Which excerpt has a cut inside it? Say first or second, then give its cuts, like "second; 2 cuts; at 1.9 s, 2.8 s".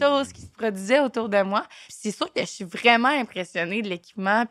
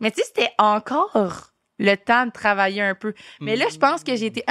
first; 1 cut; at 1.9 s